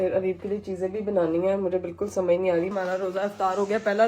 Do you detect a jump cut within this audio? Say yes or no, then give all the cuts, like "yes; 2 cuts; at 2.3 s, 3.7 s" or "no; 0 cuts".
yes; 1 cut; at 2.7 s